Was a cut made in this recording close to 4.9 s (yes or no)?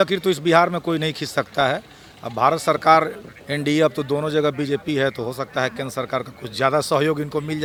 no